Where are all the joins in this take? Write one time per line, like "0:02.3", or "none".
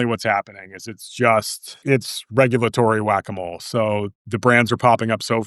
0:01.7